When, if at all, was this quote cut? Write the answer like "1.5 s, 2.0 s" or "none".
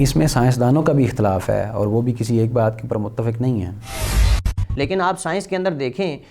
4.2 s

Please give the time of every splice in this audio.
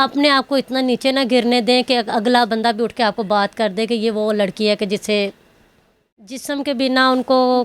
6.4 s

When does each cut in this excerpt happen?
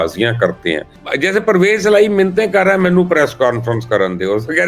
0.9 s

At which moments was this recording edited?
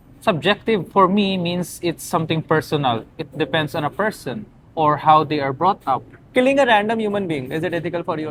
none

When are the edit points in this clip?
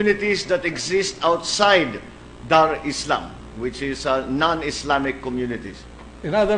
4.4 s

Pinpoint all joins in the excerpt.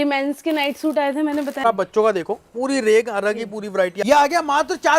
1.6 s, 4.0 s

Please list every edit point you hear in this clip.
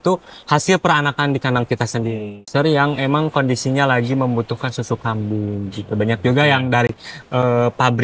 2.4 s

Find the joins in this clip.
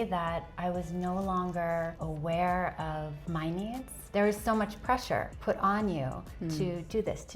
2.0 s, 3.2 s, 4.0 s, 5.3 s

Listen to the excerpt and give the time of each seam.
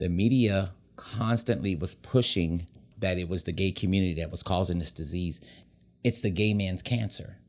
2.8 s, 5.5 s

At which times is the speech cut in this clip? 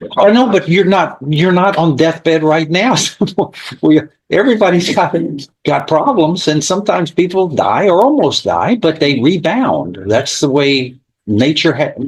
none

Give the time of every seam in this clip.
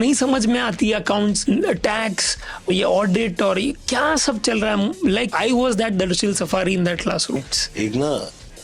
1.4 s, 2.7 s, 5.3 s, 7.4 s

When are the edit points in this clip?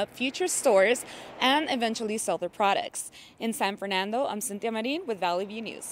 none

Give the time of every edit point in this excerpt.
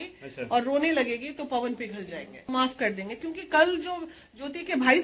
2.5 s

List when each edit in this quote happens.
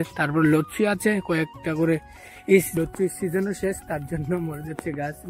2.8 s

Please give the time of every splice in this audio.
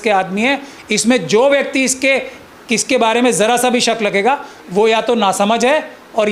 none

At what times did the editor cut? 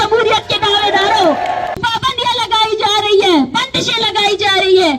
1.8 s

